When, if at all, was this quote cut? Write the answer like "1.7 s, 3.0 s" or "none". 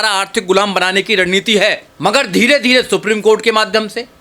1.9 s